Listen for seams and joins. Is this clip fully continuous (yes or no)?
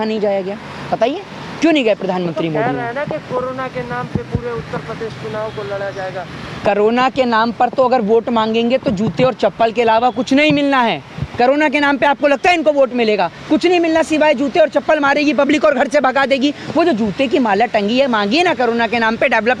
yes